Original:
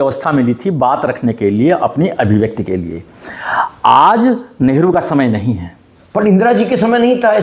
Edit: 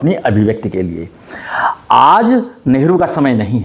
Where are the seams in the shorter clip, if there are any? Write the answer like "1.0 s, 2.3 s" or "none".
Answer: none

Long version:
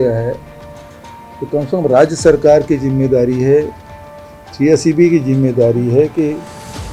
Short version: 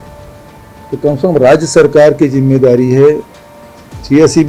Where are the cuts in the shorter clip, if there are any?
none

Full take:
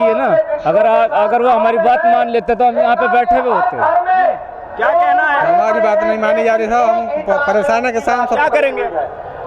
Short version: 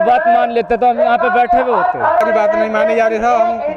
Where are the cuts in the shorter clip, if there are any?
2.2 s

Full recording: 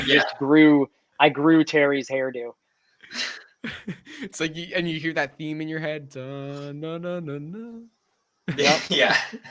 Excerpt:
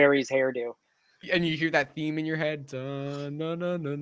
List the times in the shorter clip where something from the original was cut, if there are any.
1.2 s

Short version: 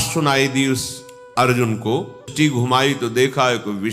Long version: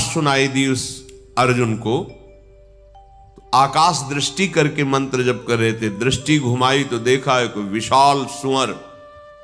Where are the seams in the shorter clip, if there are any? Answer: 2.3 s

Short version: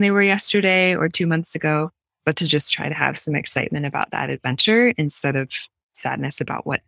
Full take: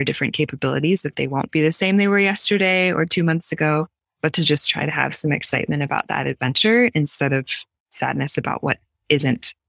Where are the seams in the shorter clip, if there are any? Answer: none

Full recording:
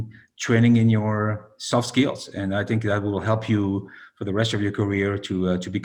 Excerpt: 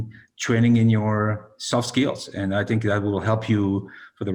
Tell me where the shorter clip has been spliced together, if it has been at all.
none

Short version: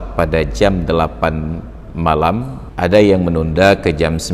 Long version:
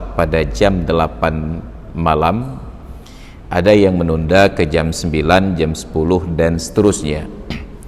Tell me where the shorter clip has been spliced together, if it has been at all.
2.6 s

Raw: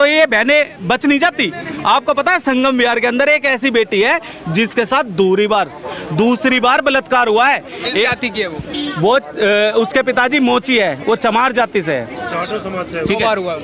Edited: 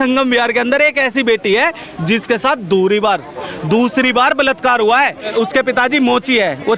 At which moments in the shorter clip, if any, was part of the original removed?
5.3 s

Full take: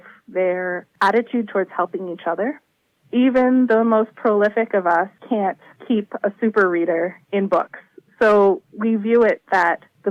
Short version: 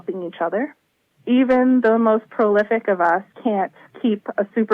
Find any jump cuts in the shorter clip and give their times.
none

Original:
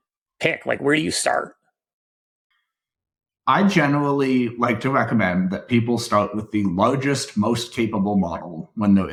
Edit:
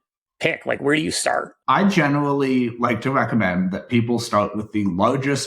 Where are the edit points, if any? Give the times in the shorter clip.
1.5 s

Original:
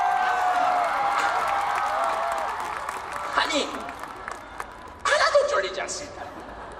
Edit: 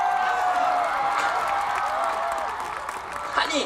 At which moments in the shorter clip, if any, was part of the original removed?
none

